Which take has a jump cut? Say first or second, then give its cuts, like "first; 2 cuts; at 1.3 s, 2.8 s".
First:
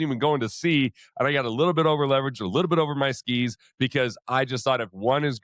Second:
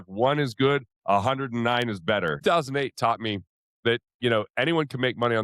second; 1 cut; at 2.4 s